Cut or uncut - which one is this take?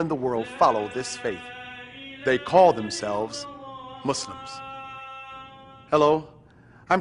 cut